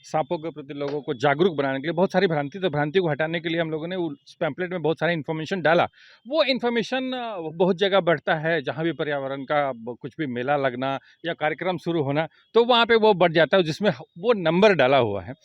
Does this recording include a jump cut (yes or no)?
no